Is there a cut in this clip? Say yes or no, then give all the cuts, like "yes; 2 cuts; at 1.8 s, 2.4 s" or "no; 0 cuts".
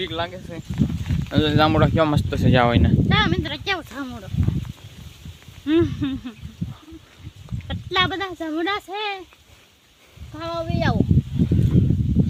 no; 0 cuts